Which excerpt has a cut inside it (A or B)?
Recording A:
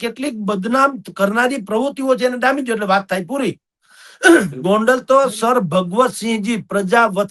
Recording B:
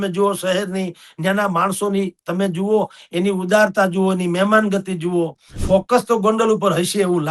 B